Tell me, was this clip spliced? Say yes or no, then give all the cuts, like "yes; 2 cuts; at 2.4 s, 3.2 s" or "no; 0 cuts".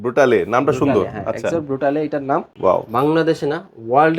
yes; 1 cut; at 2.5 s